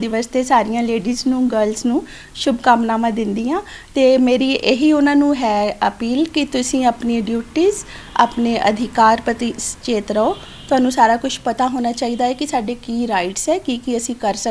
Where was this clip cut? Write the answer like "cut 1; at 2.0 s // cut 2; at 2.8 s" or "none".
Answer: none